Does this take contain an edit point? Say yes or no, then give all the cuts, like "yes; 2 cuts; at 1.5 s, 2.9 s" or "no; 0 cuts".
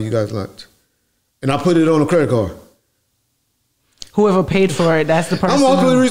no; 0 cuts